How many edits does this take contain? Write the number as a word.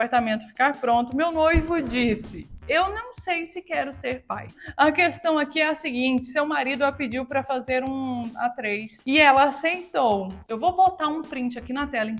two